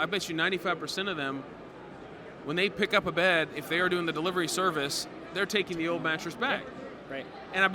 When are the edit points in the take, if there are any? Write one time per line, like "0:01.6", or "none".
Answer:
none